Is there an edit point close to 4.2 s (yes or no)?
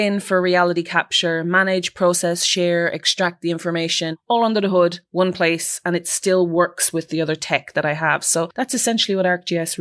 yes